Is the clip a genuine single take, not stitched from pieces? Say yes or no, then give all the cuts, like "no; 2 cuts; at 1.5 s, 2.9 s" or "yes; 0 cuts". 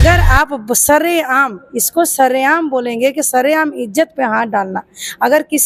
yes; 0 cuts